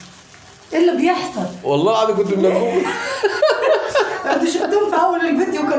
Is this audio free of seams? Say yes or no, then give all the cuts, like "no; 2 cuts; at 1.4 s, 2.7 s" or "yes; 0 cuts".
yes; 0 cuts